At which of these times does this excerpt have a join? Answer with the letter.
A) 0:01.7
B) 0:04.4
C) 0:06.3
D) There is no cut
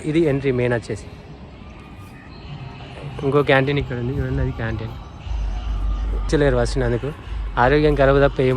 C